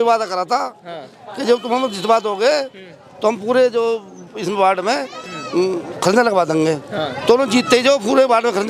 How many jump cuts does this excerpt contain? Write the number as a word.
zero